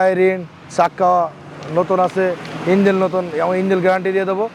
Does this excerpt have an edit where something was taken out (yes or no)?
no